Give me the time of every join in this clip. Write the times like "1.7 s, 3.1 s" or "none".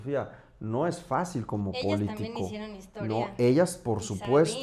none